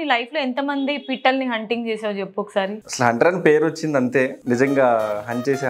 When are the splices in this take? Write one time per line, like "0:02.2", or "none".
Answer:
0:02.8
0:04.4